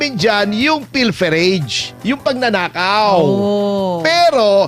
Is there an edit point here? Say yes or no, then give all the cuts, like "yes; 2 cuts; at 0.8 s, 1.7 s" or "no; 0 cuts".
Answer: no; 0 cuts